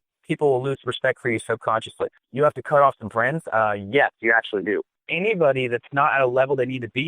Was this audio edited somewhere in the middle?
yes; 2 cuts; at 2.2 s, 5.0 s

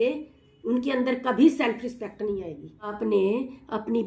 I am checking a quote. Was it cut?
yes; 1 cut; at 2.9 s

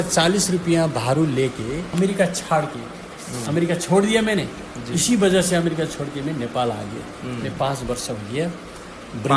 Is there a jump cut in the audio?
yes; 1 cut; at 1.8 s

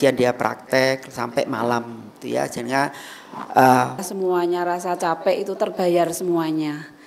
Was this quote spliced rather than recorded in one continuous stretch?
yes; 1 cut; at 4.1 s

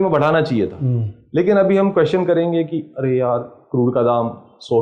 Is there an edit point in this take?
no; 0 cuts

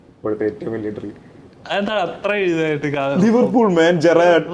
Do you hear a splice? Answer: no; 0 cuts

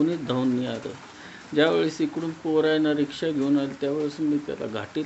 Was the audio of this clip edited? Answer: no; 0 cuts

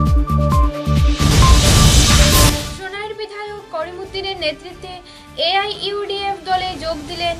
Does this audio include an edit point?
yes; 1 cut; at 2.6 s

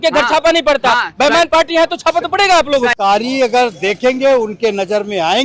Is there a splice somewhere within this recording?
yes; 1 cut; at 2.9 s

